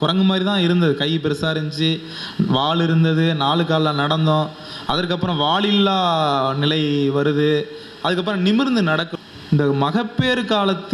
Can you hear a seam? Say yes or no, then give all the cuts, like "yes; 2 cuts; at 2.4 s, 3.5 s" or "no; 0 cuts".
yes; 1 cut; at 9.1 s